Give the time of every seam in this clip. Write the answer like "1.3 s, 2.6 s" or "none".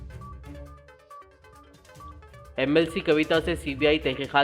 1.4 s